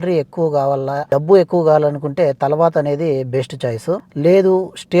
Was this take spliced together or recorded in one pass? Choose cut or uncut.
cut